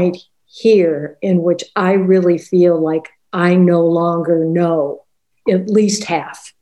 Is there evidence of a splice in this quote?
yes; 1 cut; at 5.4 s

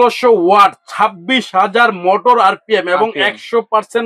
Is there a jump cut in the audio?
no; 0 cuts

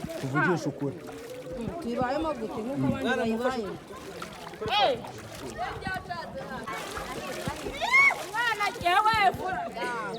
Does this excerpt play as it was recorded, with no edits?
no; 1 cut; at 6.7 s

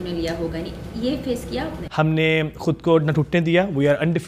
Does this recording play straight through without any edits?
no; 1 cut; at 1.8 s

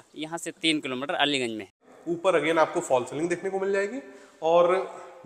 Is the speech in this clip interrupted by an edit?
yes; 1 cut; at 1.9 s

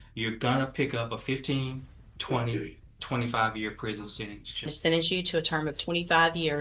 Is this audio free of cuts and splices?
no; 1 cut; at 4.7 s

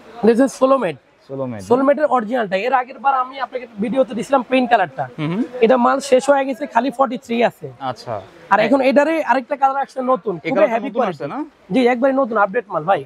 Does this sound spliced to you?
no; 0 cuts

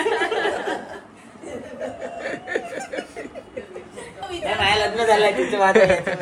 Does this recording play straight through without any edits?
yes; 0 cuts

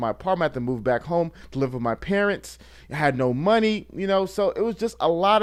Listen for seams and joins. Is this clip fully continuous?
yes; 0 cuts

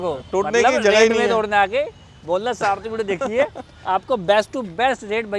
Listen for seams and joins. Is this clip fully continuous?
yes; 0 cuts

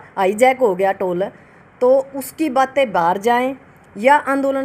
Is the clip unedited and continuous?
yes; 0 cuts

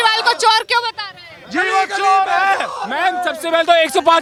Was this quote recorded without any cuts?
yes; 0 cuts

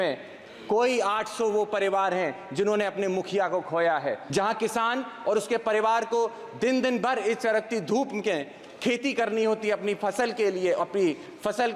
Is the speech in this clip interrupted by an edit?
yes; 1 cut; at 4.2 s

